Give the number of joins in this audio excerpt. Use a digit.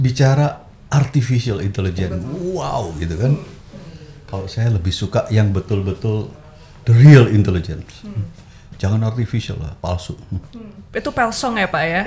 0